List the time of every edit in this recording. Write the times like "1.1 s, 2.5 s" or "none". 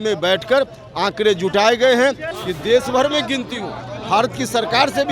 2.3 s